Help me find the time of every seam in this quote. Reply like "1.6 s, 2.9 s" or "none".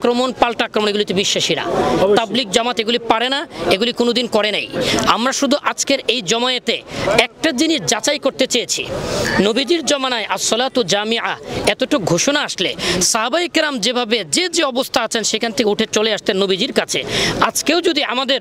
none